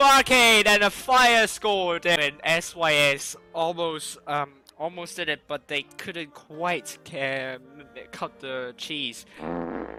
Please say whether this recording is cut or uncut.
uncut